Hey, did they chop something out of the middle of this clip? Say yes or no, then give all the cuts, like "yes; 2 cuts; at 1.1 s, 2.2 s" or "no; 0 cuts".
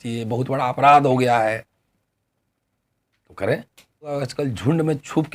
yes; 1 cut; at 4.2 s